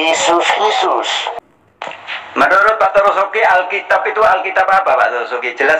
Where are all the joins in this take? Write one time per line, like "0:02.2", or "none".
0:01.4